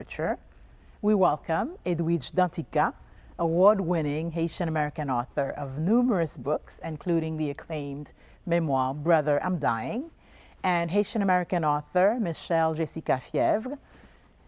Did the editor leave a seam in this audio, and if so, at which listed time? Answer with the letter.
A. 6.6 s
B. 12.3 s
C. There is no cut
C